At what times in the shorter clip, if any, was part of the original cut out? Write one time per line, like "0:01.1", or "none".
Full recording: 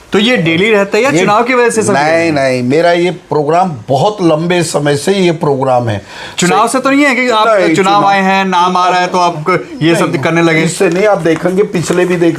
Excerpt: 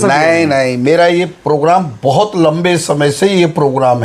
none